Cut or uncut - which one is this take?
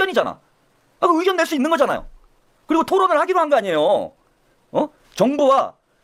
uncut